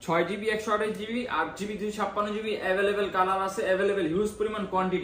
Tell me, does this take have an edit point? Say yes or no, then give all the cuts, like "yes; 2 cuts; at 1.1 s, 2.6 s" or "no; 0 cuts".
no; 0 cuts